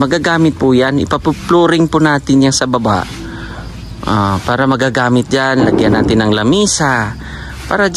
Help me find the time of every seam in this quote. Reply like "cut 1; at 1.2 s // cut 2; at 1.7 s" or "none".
none